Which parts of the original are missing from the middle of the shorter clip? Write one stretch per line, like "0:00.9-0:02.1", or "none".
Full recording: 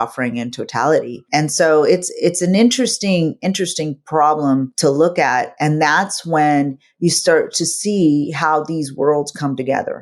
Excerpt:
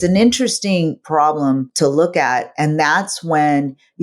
0:03.4-0:04.0